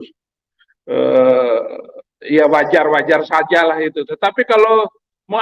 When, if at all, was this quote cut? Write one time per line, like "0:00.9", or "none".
none

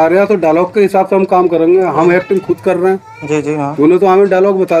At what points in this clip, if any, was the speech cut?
none

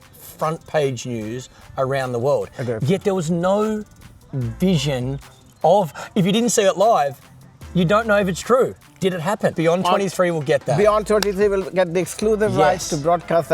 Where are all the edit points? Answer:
0:09.6

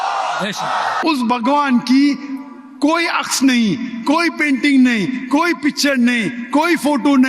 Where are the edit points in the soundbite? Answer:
0:01.0

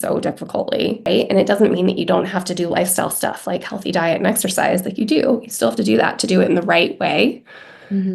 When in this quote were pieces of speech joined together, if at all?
0:01.1

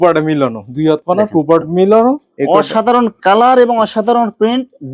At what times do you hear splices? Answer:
0:02.3

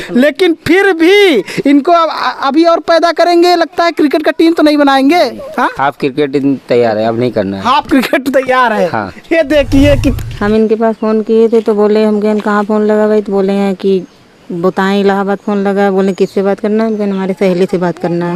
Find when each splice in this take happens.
0:10.1

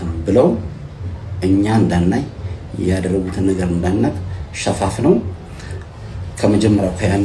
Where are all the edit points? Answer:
none

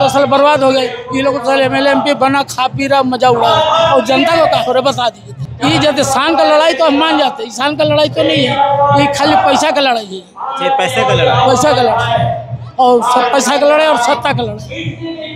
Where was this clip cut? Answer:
0:05.5

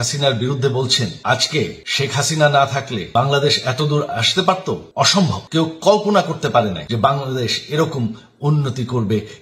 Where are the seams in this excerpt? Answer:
0:01.2
0:01.8
0:03.0
0:05.1
0:06.8

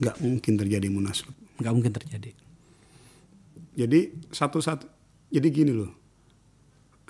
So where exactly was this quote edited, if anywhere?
none

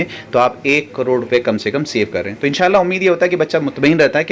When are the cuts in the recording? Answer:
none

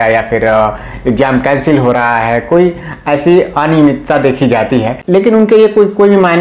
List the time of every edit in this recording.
0:05.0

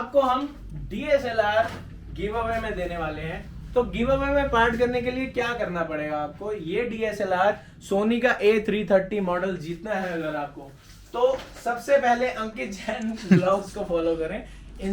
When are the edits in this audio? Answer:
none

